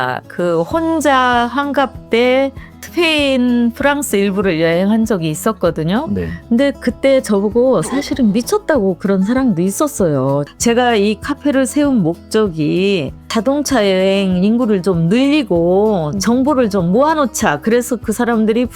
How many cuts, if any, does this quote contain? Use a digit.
2